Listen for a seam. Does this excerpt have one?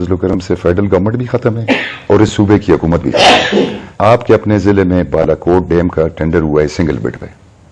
yes; 1 cut; at 3.8 s

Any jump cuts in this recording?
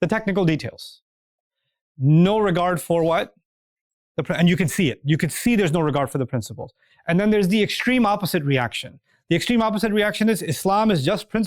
no; 0 cuts

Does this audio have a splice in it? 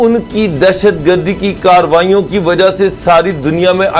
no; 0 cuts

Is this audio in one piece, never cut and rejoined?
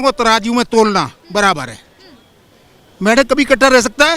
yes; 0 cuts

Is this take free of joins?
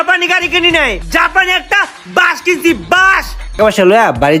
no; 2 cuts; at 1.0 s, 3.6 s

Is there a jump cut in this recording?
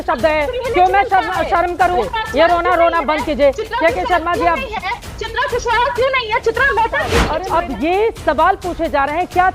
yes; 2 cuts; at 2.0 s, 7.2 s

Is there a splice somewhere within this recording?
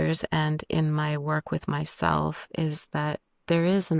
no; 0 cuts

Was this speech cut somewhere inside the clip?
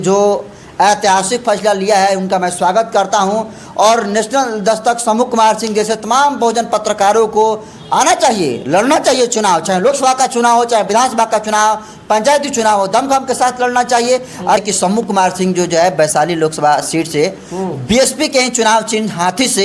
yes; 1 cut; at 14.6 s

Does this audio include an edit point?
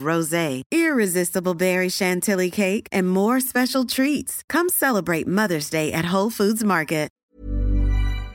yes; 1 cut; at 7.2 s

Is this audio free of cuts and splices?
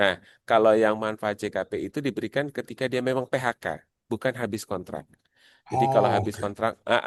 yes; 0 cuts

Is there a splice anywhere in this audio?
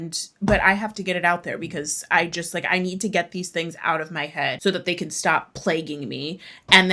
yes; 1 cut; at 4.6 s

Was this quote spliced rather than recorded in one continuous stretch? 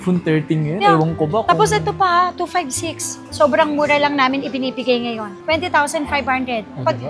no; 0 cuts

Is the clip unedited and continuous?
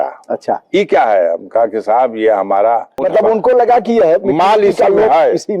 no; 1 cut; at 3.0 s

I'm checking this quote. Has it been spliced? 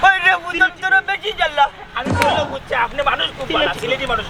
no; 0 cuts

